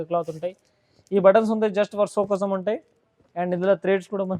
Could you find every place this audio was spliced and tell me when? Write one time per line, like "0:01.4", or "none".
none